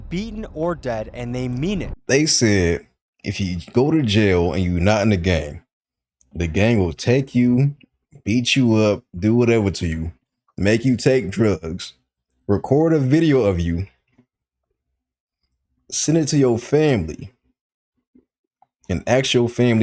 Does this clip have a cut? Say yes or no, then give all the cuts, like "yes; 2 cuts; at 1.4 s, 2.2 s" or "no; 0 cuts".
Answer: yes; 1 cut; at 1.9 s